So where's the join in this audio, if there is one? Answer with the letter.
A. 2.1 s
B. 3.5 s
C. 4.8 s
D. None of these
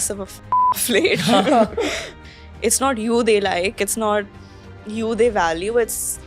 A